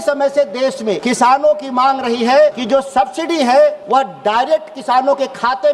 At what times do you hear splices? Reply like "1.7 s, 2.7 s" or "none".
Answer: 1.0 s, 2.6 s, 3.8 s